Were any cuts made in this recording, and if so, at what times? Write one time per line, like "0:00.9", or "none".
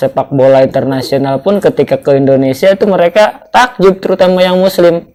none